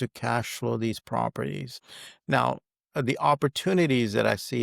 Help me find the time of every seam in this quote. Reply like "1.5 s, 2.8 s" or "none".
1.7 s